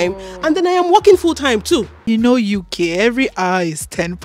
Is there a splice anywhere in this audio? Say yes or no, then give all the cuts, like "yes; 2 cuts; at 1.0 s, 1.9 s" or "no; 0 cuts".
yes; 1 cut; at 1.9 s